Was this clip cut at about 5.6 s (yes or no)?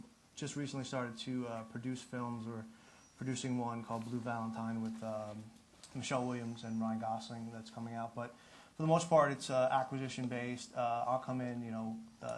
yes